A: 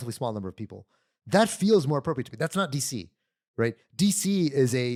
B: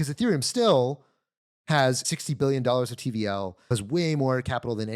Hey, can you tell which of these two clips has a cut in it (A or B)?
B